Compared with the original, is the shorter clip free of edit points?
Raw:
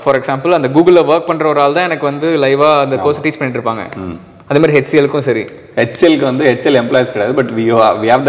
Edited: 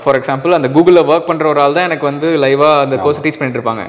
yes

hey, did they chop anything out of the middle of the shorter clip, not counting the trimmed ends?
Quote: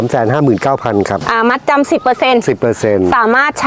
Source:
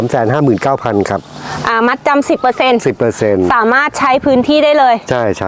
yes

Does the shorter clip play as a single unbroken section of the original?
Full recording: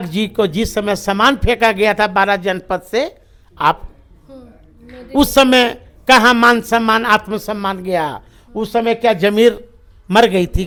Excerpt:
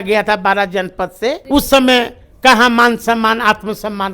no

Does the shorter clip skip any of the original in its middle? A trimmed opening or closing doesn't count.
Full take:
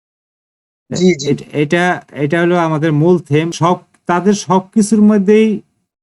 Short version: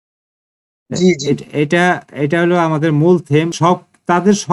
no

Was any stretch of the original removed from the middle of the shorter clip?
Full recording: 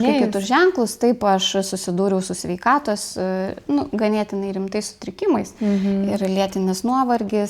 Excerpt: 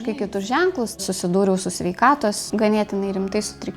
yes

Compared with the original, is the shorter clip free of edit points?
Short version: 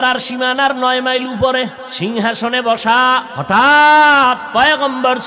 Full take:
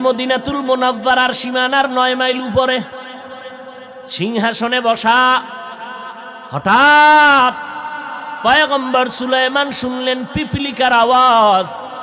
no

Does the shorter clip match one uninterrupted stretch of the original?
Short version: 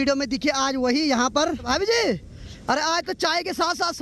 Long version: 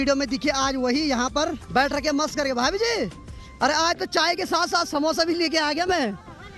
no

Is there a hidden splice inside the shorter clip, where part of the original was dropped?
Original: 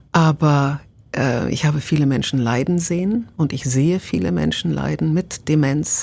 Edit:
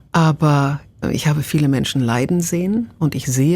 yes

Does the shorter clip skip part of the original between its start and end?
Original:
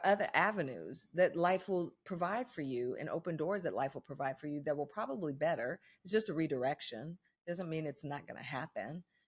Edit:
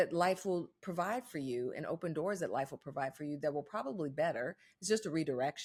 no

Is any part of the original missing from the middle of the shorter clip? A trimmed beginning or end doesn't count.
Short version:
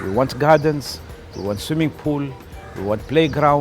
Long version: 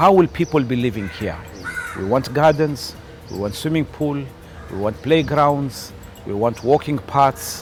no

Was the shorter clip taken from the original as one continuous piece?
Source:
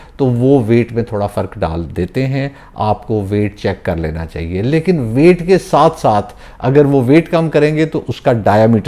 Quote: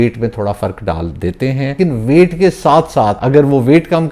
no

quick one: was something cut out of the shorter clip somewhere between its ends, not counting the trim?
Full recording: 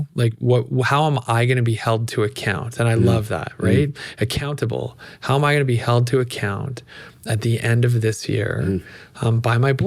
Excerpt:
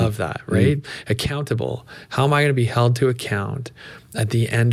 no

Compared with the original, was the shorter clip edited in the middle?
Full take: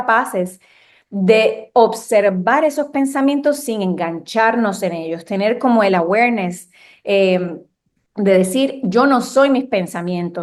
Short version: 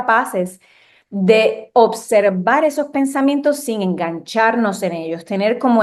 no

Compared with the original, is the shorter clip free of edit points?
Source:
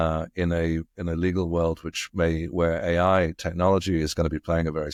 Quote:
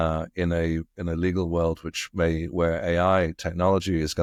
yes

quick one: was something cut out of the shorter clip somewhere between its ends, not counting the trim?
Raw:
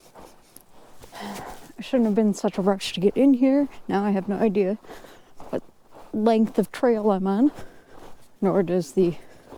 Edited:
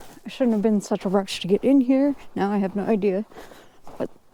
no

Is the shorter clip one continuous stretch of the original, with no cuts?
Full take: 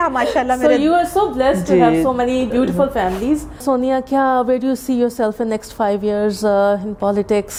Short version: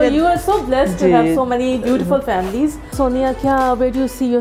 yes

